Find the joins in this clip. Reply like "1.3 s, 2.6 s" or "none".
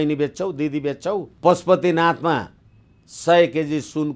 1.3 s